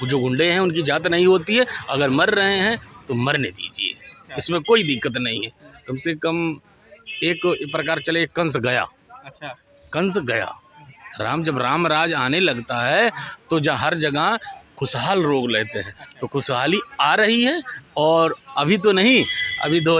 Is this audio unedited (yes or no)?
yes